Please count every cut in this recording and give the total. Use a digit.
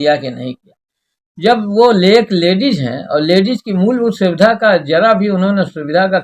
0